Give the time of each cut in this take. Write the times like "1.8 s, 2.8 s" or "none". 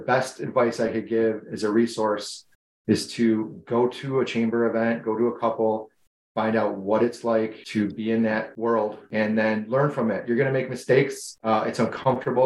7.6 s, 9.0 s, 11.3 s